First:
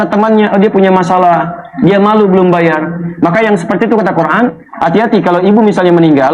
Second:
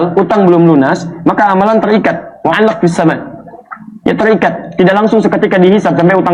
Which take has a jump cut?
first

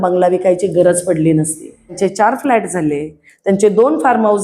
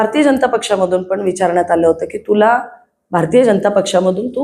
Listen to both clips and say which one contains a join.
first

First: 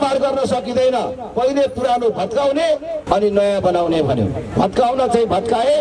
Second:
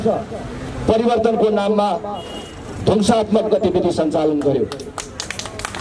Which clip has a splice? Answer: first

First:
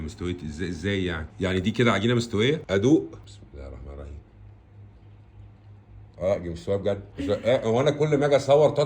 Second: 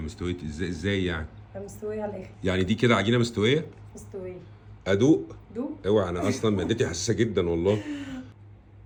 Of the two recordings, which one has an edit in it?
first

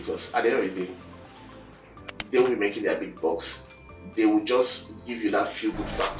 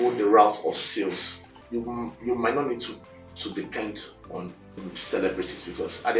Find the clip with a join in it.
second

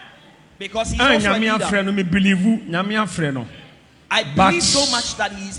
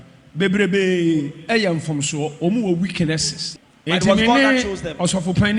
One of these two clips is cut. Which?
second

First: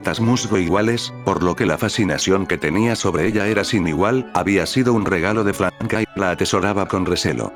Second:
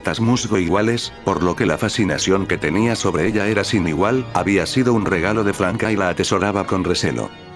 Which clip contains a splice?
second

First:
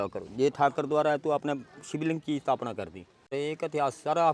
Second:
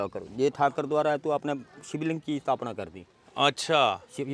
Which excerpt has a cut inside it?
first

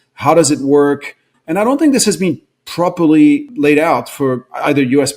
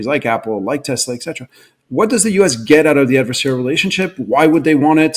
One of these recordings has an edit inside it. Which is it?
first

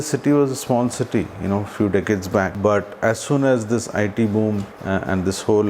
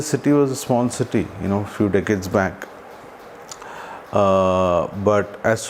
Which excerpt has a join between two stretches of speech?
first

